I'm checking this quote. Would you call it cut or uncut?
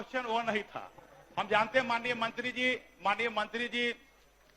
uncut